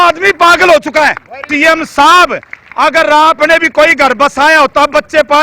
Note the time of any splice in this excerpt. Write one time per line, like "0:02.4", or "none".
0:01.5